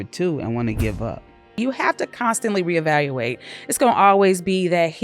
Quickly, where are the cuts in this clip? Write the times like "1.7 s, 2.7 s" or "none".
1.6 s